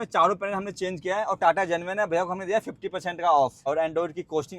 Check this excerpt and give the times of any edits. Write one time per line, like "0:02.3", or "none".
0:03.6